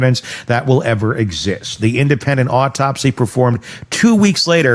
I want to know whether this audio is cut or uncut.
uncut